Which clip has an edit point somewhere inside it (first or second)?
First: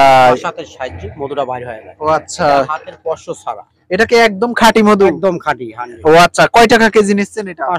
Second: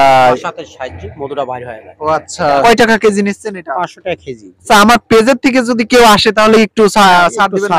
second